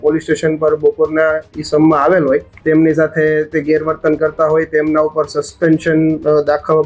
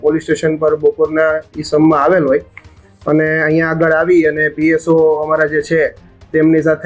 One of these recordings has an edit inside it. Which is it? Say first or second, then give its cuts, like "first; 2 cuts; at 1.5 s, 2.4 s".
first; 1 cut; at 2.5 s